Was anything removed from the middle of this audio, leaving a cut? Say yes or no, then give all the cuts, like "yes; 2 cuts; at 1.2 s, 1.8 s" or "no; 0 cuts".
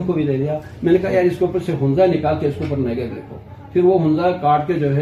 no; 0 cuts